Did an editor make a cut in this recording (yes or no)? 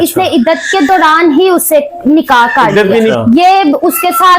yes